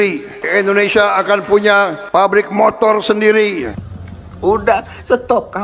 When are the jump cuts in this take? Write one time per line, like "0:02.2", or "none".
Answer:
0:03.7